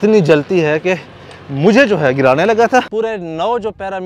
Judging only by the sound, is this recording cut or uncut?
cut